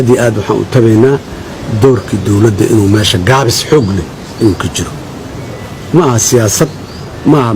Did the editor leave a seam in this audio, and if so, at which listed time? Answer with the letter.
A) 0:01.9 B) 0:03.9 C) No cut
C